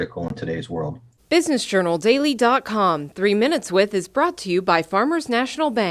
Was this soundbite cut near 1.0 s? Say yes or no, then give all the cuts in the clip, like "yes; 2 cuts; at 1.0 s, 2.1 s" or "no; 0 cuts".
yes; 1 cut; at 1.0 s